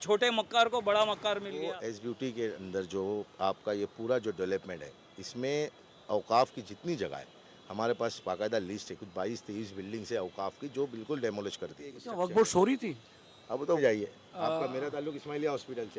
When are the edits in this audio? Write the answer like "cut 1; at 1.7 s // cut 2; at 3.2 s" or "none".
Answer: cut 1; at 1.9 s // cut 2; at 12.0 s // cut 3; at 13.8 s